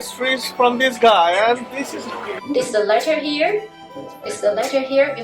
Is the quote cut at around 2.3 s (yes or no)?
yes